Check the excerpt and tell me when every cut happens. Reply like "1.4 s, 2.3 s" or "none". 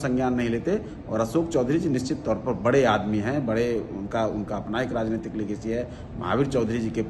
none